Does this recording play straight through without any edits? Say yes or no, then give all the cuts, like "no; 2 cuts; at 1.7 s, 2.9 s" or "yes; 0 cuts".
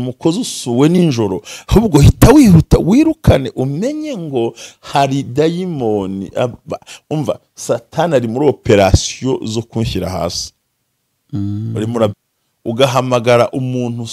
no; 1 cut; at 12.2 s